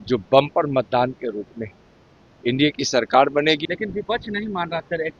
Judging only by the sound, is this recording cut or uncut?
cut